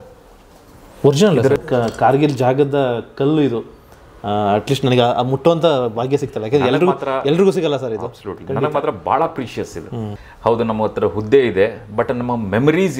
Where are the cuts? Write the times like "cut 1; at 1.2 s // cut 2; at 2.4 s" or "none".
cut 1; at 1.6 s // cut 2; at 10.2 s